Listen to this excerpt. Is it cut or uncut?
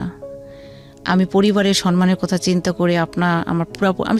uncut